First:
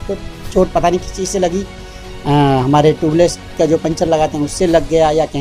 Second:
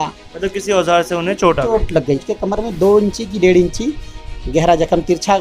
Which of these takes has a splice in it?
second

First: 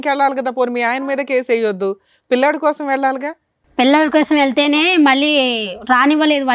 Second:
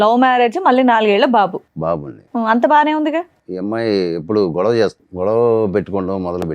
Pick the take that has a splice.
second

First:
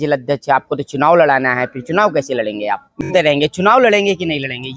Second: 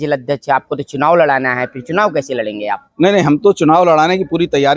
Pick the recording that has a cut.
first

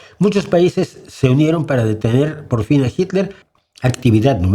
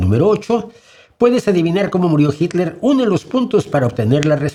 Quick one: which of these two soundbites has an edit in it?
first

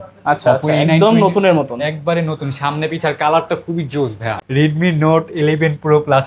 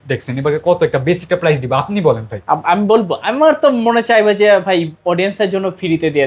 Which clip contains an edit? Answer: first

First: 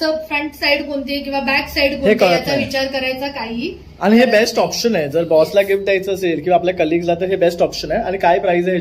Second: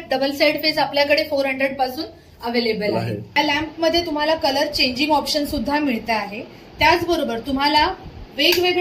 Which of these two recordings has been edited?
second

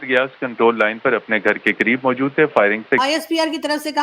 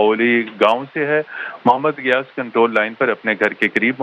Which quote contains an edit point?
first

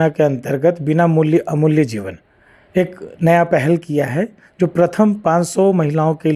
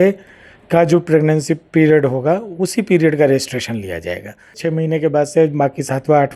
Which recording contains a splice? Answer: second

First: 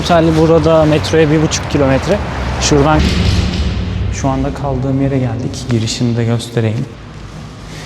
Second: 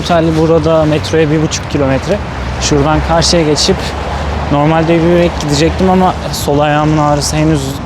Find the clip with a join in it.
first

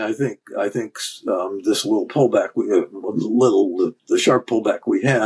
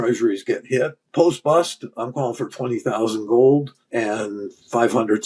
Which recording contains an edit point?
second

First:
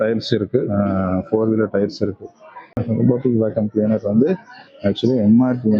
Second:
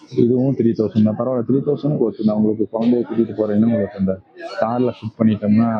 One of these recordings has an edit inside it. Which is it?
first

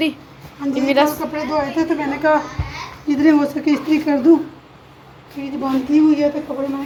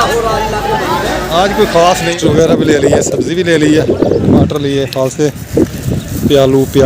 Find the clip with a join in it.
second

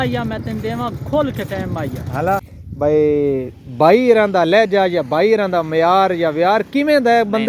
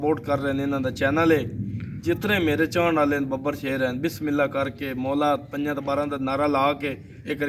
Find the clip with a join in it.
first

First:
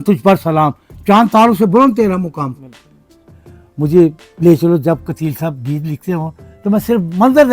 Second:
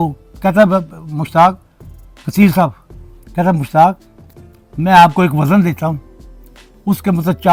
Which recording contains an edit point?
first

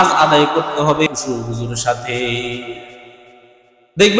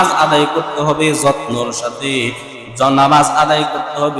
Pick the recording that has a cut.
first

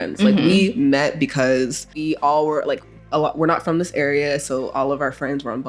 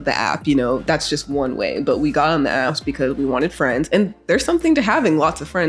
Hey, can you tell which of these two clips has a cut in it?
first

